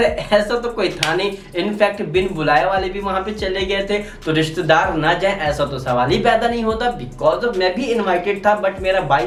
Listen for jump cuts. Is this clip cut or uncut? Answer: uncut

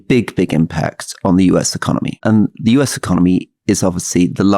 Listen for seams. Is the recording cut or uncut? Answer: cut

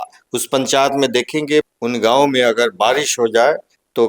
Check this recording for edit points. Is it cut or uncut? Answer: cut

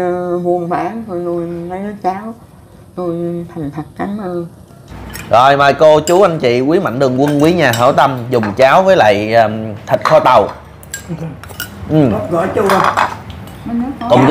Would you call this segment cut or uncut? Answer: cut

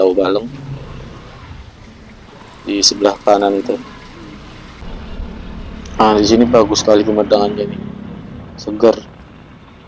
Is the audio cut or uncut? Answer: cut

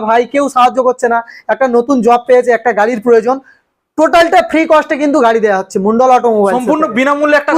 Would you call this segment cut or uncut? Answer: uncut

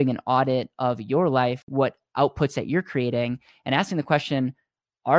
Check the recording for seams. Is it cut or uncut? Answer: cut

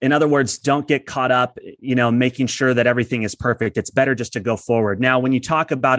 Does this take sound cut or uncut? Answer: uncut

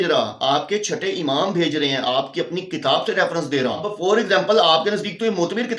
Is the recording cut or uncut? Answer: cut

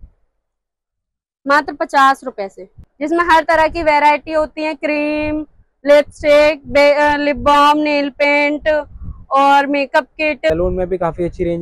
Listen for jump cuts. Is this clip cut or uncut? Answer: cut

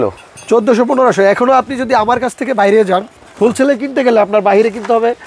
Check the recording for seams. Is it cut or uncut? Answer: uncut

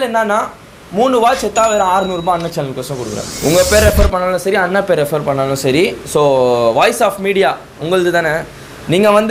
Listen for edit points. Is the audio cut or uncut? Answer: uncut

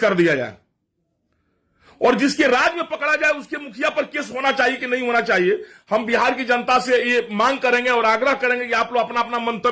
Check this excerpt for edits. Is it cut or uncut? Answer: uncut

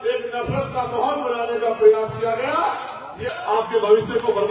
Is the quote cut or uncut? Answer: cut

